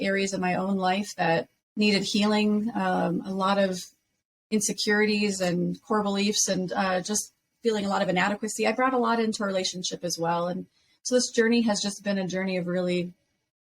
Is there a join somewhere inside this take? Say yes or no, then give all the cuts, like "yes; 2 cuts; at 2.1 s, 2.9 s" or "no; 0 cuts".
yes; 1 cut; at 1.6 s